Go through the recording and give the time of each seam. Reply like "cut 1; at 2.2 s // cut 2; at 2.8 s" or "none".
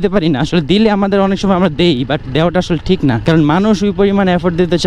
cut 1; at 3.2 s